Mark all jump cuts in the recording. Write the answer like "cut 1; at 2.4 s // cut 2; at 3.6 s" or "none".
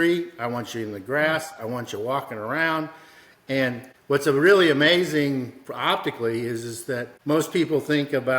cut 1; at 3.9 s // cut 2; at 7.1 s